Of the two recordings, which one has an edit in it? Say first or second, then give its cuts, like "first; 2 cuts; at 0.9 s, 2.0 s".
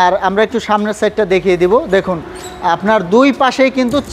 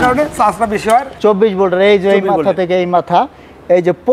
second; 1 cut; at 1.1 s